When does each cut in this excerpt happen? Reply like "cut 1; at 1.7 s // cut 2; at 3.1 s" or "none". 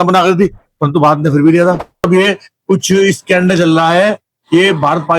cut 1; at 2.1 s